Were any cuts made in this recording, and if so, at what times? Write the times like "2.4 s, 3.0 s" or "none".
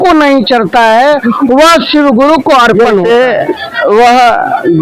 3.0 s